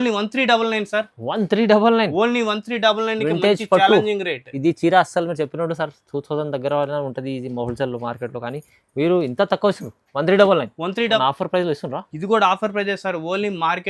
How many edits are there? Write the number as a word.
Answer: one